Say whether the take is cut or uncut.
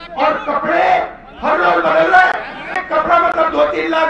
cut